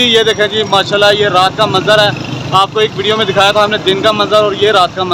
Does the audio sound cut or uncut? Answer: uncut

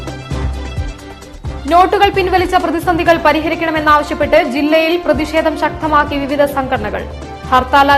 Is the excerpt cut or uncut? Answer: cut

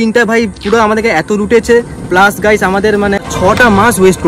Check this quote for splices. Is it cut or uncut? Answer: cut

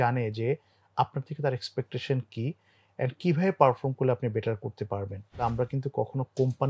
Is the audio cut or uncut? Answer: cut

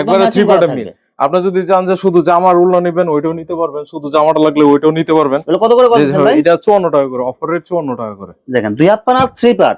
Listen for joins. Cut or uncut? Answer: uncut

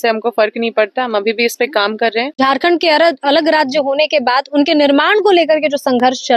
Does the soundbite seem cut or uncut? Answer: cut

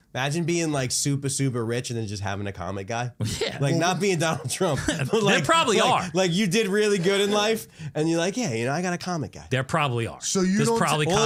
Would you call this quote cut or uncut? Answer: uncut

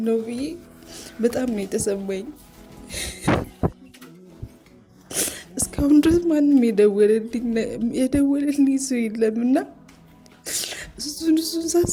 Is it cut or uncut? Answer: uncut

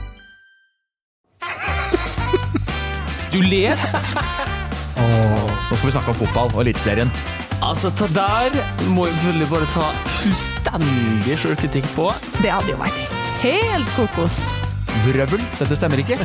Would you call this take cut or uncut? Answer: cut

